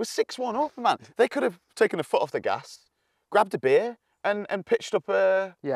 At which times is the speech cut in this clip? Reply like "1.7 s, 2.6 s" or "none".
4.0 s